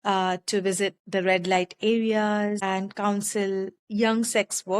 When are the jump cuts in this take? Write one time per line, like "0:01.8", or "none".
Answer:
0:02.6
0:03.8